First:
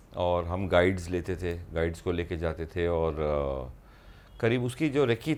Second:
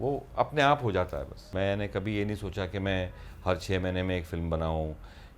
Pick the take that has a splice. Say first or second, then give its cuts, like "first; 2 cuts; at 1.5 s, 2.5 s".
second; 1 cut; at 1.5 s